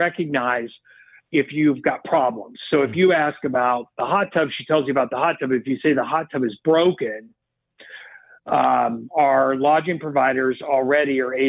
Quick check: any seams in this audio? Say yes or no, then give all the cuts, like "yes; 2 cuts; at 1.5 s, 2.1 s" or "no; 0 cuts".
no; 0 cuts